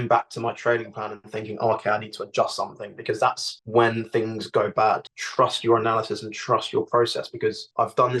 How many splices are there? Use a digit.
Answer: 1